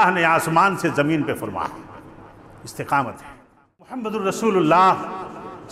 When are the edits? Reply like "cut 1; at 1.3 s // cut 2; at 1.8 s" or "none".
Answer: cut 1; at 4.1 s